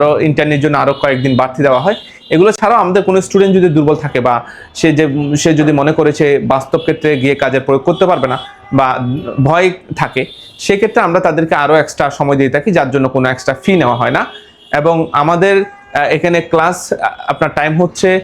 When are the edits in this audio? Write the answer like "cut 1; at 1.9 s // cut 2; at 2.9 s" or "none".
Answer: none